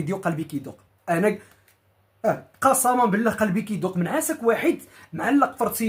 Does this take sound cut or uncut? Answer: uncut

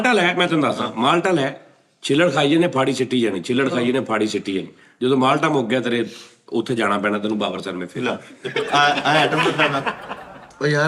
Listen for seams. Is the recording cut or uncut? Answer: uncut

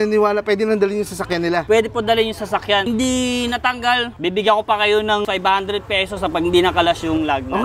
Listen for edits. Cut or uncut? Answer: cut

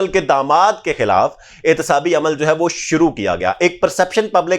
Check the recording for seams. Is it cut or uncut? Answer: uncut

